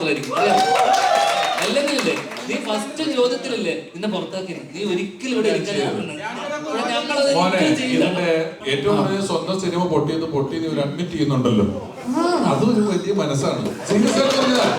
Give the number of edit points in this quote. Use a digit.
1